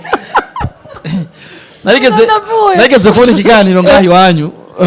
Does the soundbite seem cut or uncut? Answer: uncut